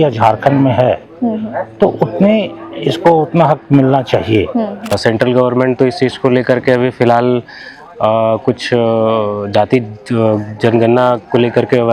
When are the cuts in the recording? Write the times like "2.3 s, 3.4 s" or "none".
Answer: 5.0 s